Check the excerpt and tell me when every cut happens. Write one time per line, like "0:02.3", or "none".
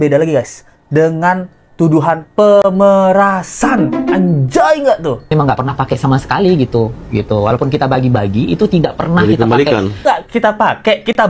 0:05.3
0:10.0